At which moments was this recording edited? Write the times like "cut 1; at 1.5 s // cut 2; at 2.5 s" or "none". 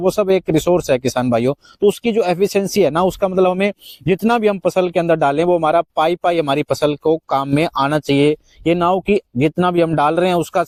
none